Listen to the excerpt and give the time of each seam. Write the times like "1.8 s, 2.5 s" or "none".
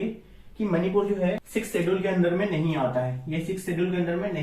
1.4 s